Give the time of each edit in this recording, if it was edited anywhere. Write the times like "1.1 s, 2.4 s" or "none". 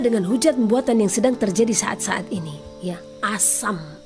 none